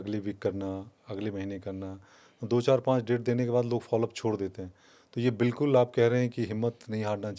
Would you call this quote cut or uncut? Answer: uncut